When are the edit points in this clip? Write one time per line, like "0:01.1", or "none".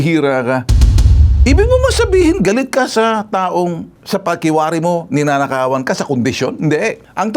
0:01.1